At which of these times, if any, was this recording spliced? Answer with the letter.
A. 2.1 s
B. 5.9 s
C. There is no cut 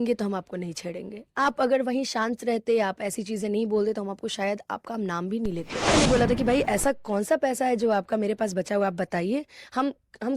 B